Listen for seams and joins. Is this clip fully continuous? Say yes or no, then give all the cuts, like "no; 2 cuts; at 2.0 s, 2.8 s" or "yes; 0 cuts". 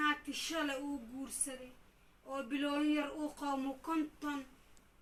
yes; 0 cuts